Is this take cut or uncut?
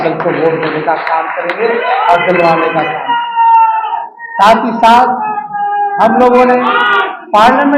uncut